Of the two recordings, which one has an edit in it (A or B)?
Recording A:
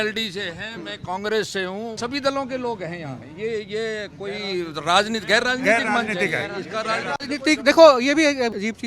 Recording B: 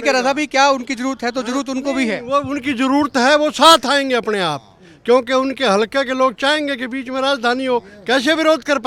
A